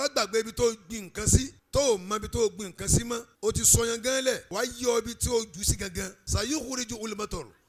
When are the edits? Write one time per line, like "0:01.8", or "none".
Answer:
0:01.6
0:03.3
0:04.5
0:06.2